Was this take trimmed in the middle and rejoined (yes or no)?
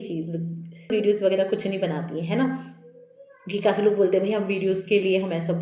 yes